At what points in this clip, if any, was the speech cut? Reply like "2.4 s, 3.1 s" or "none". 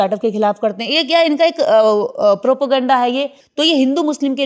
3.4 s